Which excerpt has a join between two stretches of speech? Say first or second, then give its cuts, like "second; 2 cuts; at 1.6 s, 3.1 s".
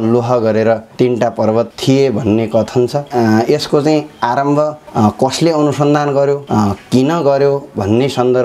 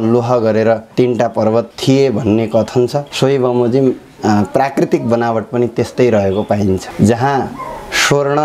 first; 1 cut; at 3.0 s